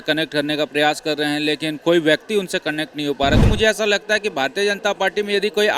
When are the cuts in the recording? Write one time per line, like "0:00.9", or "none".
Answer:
0:03.4